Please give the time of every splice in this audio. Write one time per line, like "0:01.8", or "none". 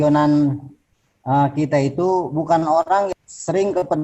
0:03.1